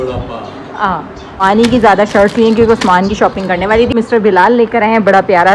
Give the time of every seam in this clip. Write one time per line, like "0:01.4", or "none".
0:01.4
0:03.9